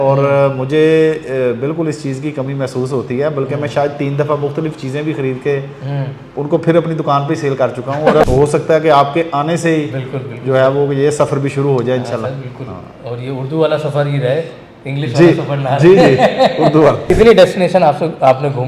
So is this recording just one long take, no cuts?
no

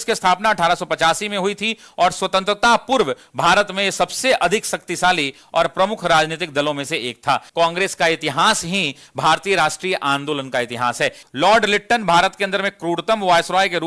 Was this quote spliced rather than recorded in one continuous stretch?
yes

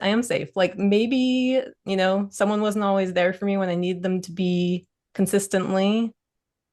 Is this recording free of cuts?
yes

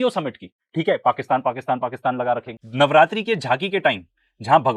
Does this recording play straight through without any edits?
yes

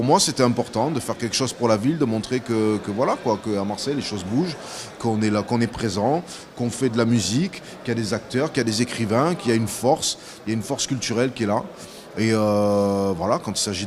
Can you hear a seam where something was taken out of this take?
no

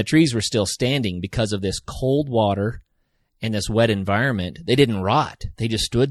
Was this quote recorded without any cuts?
yes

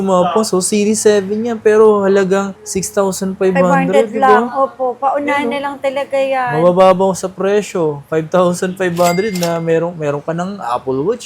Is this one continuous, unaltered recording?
yes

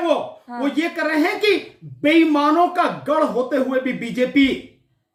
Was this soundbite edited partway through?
no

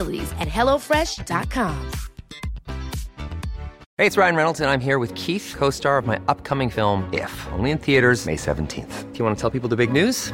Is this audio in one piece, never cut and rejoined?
no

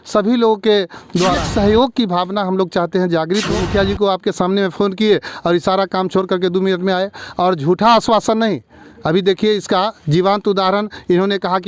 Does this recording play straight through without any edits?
no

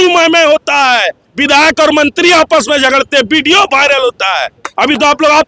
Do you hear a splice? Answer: yes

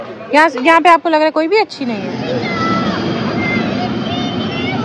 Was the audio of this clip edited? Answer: yes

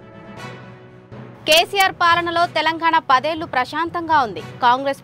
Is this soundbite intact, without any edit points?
yes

